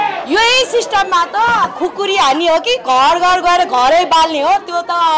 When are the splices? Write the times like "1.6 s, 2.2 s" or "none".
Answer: none